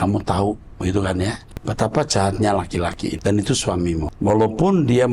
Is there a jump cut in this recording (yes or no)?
yes